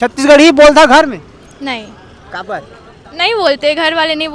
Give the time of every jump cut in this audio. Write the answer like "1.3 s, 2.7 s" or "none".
none